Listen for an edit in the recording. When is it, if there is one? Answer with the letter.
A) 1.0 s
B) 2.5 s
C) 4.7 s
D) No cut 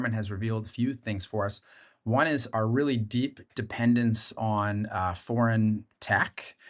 B